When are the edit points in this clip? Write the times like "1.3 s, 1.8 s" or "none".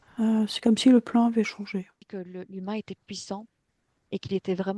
2.0 s